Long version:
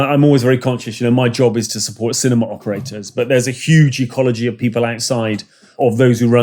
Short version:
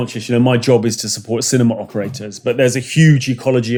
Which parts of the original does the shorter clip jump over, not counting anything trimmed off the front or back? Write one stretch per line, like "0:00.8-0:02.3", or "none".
none